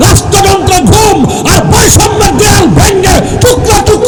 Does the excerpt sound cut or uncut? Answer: uncut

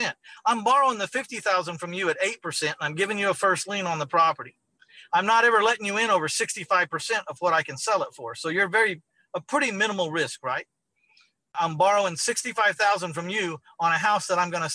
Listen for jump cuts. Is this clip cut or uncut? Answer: uncut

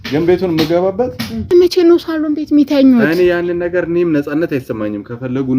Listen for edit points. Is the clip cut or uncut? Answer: cut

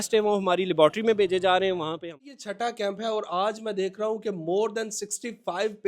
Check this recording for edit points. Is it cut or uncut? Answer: cut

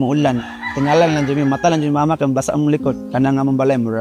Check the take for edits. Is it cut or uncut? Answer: cut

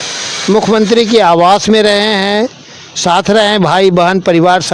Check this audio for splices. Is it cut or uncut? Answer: uncut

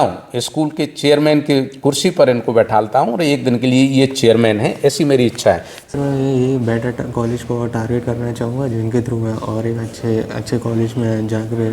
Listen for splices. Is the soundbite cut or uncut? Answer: cut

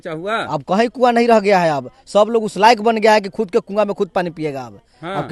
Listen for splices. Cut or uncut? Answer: uncut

